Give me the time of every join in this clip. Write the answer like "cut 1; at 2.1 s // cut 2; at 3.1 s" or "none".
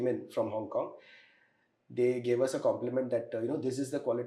none